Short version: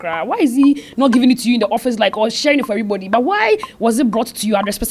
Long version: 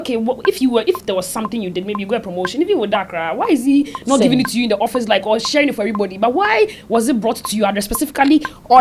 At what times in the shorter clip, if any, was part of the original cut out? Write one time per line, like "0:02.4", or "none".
none